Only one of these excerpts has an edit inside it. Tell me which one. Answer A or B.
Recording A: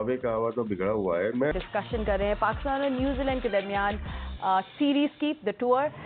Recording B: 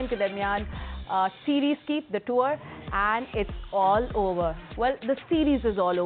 A